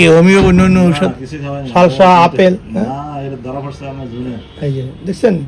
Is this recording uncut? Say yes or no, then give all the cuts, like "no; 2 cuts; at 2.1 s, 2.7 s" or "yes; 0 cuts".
yes; 0 cuts